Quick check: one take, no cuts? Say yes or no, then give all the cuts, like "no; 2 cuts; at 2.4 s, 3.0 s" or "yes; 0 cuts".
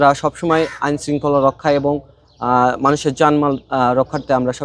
yes; 0 cuts